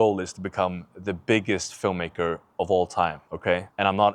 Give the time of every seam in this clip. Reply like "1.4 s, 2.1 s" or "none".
none